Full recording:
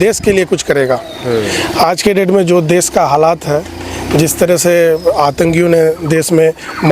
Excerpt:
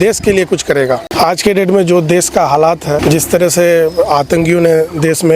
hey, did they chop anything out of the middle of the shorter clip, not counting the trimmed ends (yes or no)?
yes